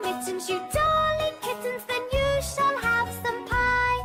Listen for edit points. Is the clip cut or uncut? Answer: uncut